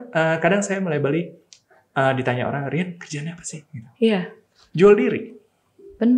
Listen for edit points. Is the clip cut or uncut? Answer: uncut